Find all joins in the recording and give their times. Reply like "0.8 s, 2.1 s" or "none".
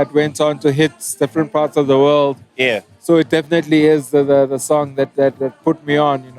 2.9 s